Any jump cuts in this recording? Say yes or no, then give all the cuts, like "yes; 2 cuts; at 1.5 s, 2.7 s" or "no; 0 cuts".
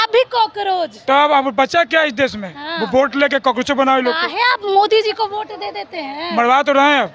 no; 0 cuts